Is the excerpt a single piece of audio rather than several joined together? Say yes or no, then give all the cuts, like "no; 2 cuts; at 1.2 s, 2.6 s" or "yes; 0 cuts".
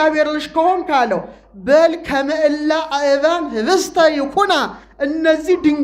yes; 0 cuts